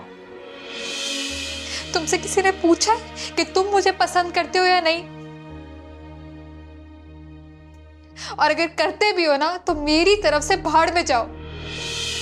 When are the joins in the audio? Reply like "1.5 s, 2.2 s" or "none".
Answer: none